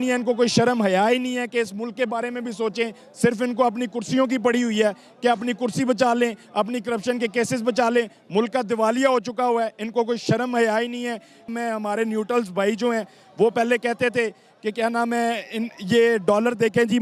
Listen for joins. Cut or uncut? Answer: cut